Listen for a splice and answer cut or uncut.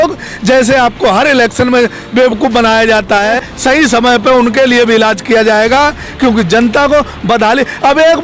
cut